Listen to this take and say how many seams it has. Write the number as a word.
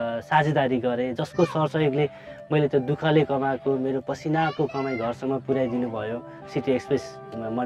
zero